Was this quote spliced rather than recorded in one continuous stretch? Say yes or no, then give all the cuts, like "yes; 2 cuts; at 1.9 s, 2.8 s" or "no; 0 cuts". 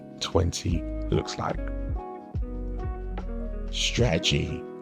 no; 0 cuts